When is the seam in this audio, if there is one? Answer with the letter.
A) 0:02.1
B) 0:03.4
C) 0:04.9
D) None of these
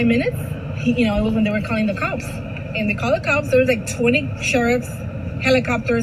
D